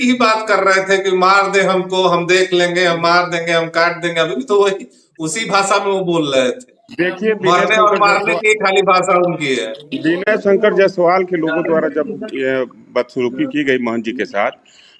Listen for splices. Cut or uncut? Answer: uncut